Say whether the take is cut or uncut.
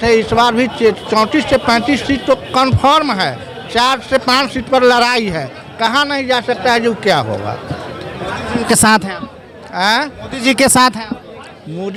uncut